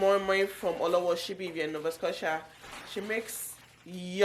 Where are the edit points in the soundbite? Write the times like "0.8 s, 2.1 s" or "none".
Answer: none